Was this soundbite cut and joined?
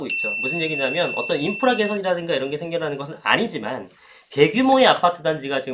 no; 0 cuts

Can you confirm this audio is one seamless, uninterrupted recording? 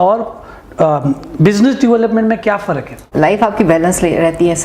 no; 1 cut; at 3.0 s

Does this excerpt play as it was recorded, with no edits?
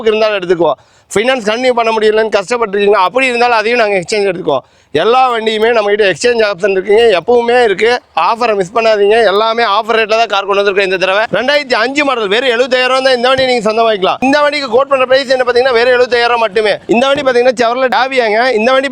no; 3 cuts; at 11.2 s, 14.2 s, 16.8 s

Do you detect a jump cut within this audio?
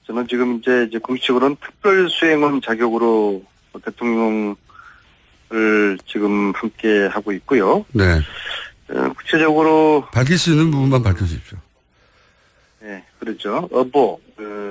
no; 0 cuts

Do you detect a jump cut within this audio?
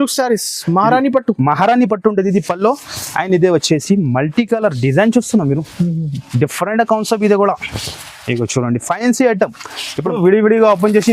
yes; 1 cut; at 10.1 s

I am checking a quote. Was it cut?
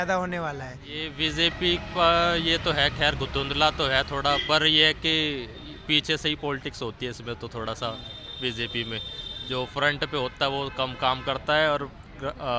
yes; 1 cut; at 1.1 s

